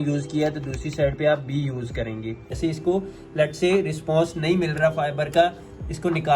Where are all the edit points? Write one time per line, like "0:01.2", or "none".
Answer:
0:02.5